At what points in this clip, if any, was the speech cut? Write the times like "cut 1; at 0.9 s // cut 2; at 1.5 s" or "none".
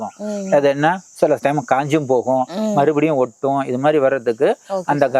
none